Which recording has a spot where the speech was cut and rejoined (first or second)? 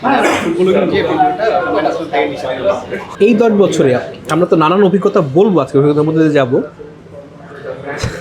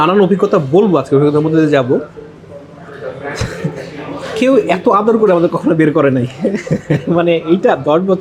first